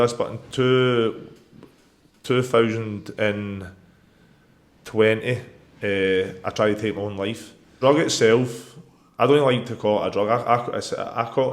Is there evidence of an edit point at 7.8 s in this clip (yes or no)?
yes